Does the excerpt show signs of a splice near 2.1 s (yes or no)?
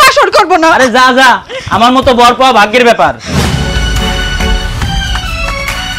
no